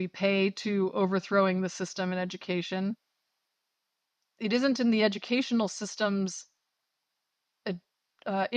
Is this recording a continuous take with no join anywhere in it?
yes; 0 cuts

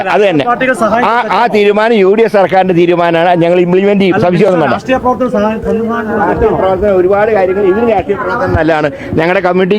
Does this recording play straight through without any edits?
yes; 0 cuts

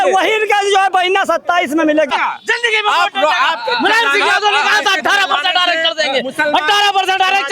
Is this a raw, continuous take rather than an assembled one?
no; 1 cut; at 2.1 s

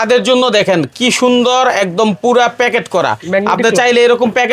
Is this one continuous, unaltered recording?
yes; 0 cuts

